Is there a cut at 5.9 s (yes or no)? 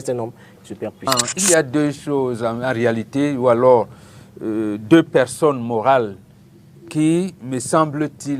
no